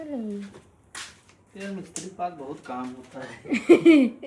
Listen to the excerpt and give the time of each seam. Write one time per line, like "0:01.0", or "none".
none